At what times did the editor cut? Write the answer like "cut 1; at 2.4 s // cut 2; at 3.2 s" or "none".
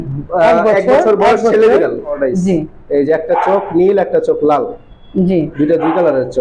cut 1; at 2.2 s